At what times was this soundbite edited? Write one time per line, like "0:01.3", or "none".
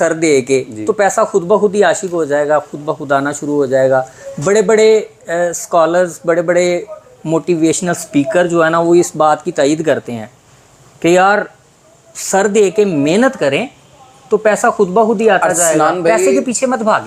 none